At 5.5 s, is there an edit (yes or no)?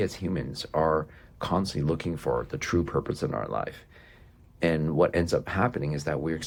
no